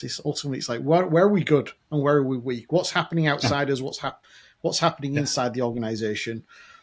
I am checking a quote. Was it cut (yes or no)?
no